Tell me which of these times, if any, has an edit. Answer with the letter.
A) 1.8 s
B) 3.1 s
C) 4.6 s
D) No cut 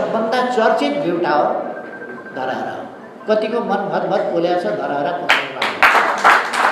B